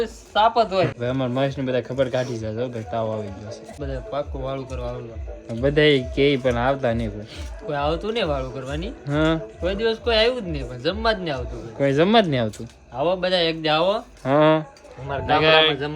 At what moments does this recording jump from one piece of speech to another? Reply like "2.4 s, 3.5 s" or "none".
0.9 s, 3.8 s